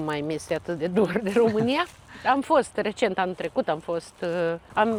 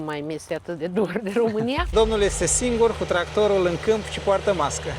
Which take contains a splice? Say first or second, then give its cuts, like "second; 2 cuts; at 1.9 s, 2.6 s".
second; 1 cut; at 1.9 s